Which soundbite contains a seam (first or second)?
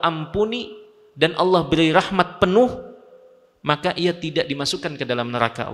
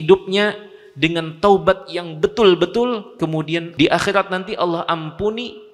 second